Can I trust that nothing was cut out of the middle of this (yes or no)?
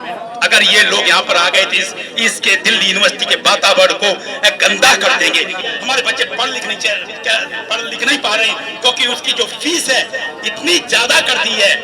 no